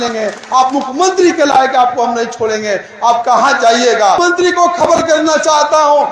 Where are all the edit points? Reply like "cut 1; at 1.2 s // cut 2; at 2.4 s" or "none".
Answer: cut 1; at 4.2 s